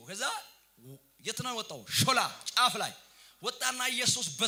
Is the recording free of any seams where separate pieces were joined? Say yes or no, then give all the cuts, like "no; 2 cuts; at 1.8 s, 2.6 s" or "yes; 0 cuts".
yes; 0 cuts